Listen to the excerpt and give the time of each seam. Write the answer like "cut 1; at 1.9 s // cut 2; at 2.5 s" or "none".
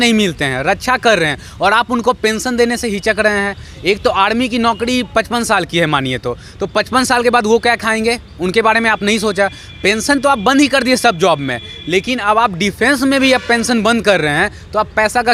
none